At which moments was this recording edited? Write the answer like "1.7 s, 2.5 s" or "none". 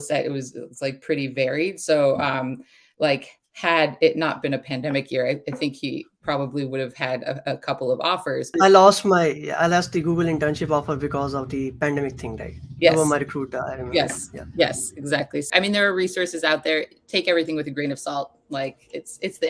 8.5 s, 15.5 s